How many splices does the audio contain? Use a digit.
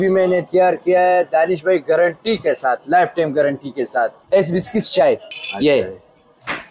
2